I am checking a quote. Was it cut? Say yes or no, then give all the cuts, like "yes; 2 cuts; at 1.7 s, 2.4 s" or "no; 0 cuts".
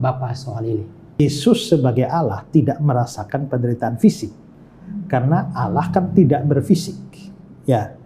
yes; 1 cut; at 1.2 s